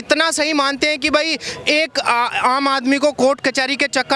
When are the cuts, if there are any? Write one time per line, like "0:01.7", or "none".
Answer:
none